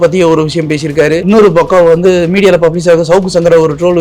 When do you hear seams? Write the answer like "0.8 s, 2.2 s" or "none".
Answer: 1.2 s